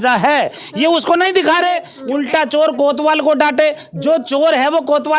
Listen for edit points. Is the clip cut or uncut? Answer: cut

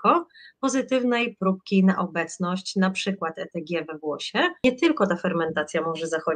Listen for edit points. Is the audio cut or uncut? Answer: cut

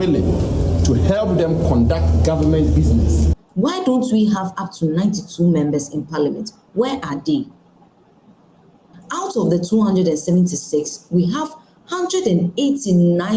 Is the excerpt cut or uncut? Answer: cut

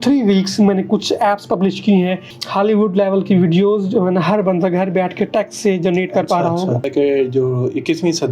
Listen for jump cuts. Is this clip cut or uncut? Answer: cut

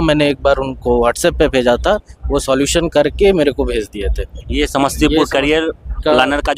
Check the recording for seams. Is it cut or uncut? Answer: uncut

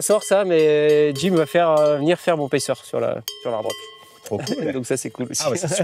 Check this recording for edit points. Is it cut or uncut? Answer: uncut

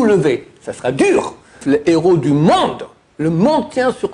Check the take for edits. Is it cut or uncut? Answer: cut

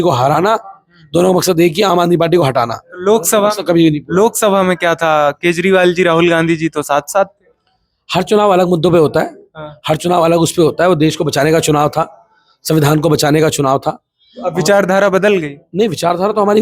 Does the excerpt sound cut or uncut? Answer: uncut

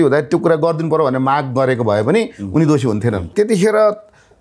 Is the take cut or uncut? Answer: cut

